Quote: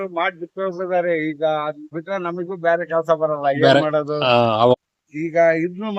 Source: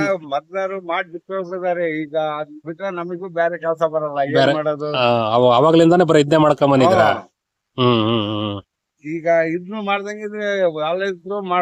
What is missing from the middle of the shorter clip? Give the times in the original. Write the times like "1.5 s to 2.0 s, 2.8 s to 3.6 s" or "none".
5.5 s to 8.6 s